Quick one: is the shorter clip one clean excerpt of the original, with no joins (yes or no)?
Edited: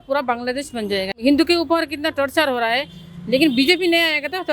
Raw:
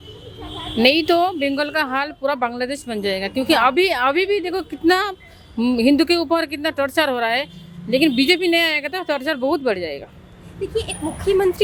no